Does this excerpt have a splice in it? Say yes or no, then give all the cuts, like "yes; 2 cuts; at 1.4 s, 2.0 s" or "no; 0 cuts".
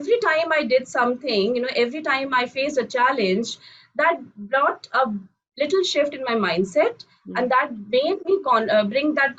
no; 0 cuts